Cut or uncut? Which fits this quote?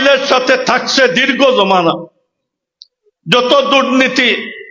uncut